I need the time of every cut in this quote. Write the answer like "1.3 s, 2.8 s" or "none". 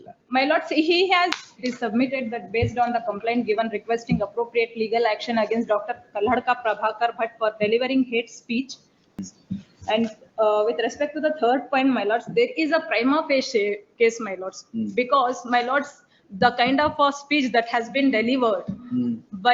1.3 s, 9.0 s